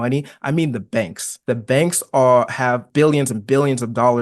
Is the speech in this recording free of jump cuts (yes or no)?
no